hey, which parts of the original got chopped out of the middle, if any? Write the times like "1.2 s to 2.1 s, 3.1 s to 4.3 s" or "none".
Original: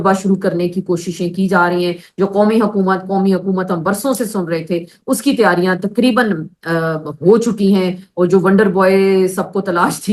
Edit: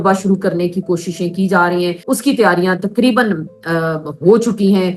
2.0 s to 5.0 s